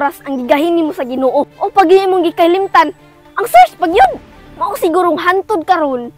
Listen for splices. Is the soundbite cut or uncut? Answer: cut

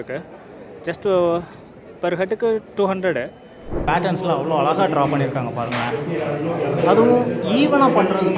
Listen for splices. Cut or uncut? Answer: cut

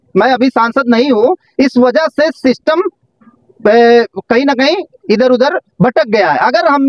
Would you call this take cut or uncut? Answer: uncut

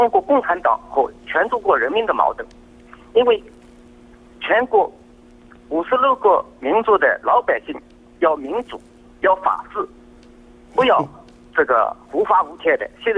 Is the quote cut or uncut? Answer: uncut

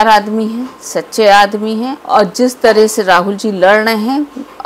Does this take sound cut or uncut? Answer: cut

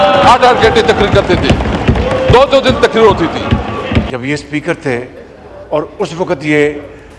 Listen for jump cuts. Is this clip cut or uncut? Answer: cut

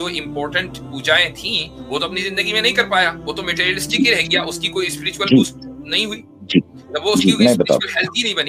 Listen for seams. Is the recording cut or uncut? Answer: uncut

